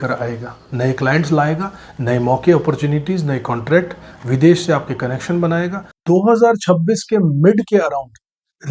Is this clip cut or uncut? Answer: cut